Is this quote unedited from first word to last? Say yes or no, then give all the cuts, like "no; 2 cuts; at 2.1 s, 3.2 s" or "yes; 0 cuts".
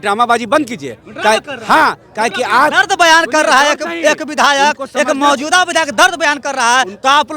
yes; 0 cuts